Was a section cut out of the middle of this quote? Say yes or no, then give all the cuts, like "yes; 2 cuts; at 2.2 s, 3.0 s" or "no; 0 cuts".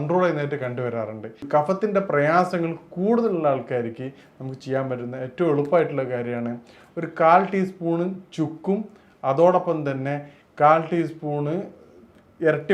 yes; 1 cut; at 1.4 s